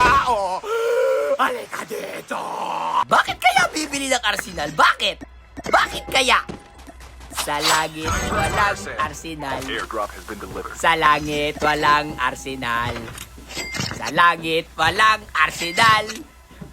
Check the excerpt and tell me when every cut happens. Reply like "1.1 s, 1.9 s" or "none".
3.0 s